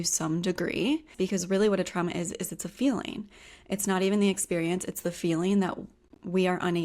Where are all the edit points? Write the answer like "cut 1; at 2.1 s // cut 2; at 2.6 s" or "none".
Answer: cut 1; at 1.1 s